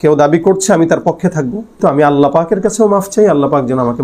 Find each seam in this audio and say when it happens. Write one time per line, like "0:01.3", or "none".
0:01.7